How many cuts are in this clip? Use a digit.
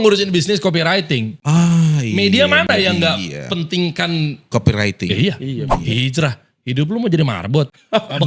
1